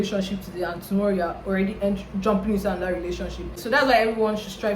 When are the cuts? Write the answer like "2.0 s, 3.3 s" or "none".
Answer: 3.6 s

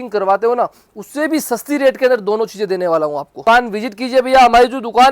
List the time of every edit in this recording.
3.3 s

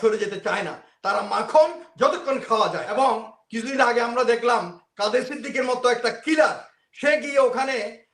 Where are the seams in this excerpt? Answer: 2.9 s

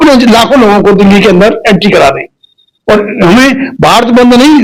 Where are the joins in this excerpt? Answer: none

